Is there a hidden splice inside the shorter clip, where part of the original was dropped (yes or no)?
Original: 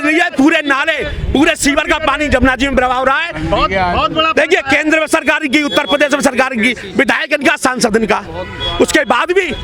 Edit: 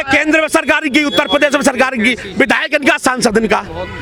no